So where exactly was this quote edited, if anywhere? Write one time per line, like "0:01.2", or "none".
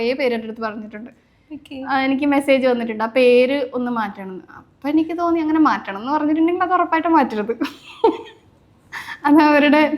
none